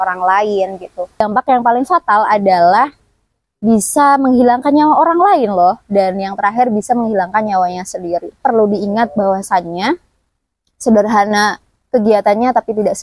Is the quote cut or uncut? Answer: cut